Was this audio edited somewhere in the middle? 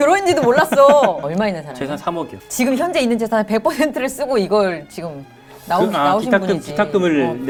no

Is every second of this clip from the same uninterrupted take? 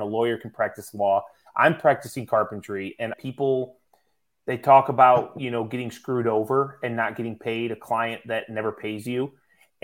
no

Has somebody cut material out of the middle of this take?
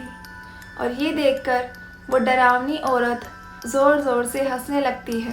yes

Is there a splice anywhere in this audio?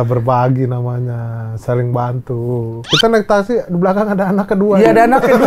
no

